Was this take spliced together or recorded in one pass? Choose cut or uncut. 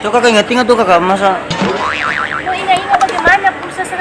uncut